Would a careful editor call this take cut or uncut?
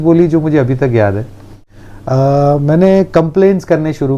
uncut